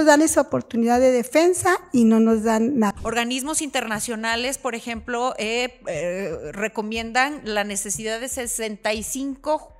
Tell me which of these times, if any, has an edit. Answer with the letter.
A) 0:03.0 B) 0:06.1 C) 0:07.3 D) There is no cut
A